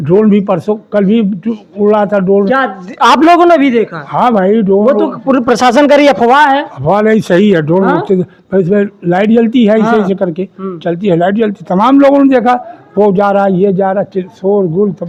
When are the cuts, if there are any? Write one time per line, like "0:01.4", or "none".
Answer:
none